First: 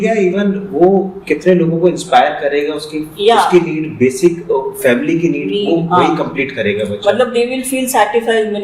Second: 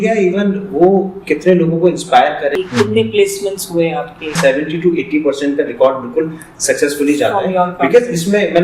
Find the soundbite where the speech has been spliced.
second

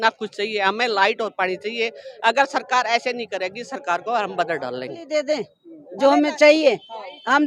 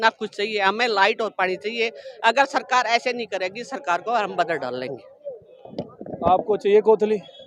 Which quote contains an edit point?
first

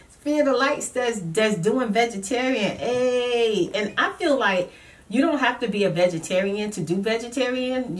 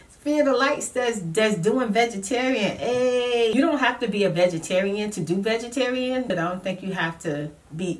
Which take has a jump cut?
second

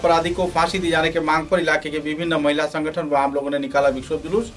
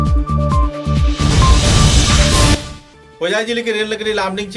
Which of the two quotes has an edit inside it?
second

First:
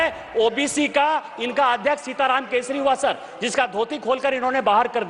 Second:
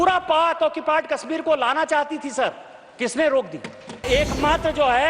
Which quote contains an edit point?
second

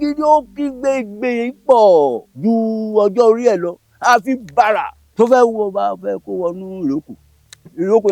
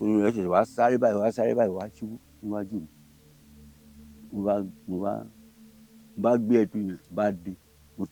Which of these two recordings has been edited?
first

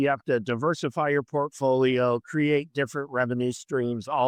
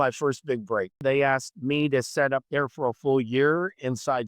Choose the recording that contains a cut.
second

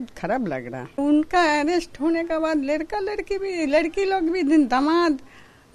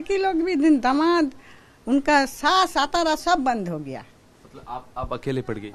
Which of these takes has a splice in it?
first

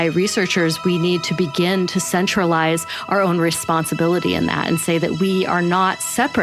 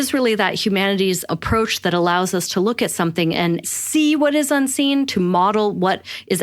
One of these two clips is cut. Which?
second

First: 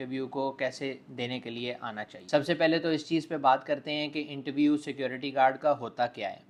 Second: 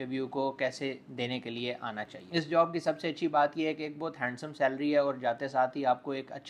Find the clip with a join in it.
second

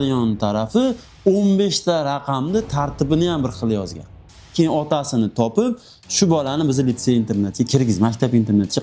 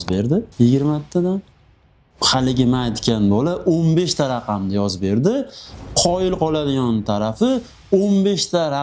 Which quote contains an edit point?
first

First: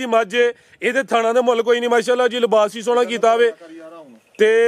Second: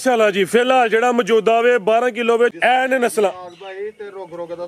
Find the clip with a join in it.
second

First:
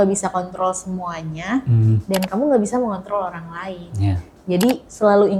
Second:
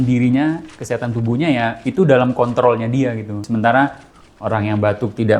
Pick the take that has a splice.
second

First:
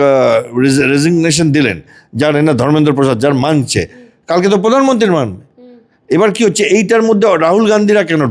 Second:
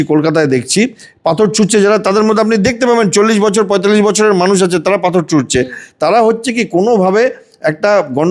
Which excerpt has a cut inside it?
second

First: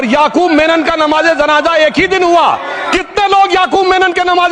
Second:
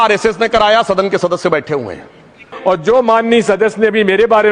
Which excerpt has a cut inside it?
second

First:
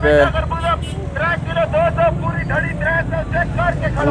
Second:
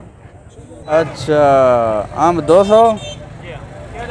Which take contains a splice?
second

